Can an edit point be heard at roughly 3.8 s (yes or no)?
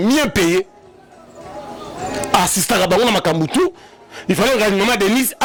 no